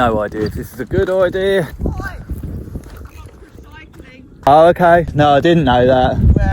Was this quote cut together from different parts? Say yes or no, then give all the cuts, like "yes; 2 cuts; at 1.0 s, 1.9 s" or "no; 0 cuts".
yes; 3 cuts; at 1.7 s, 4.5 s, 5.1 s